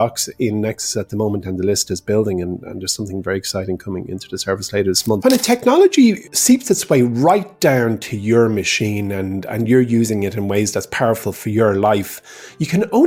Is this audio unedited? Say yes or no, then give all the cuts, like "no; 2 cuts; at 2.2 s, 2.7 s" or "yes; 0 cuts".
no; 2 cuts; at 5.2 s, 6.3 s